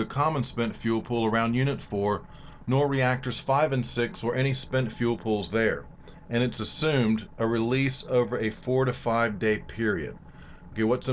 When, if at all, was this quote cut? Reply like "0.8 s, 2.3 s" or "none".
9.4 s